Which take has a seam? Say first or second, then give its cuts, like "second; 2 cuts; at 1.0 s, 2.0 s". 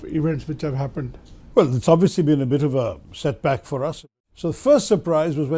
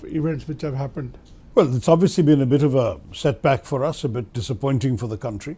first; 1 cut; at 4.0 s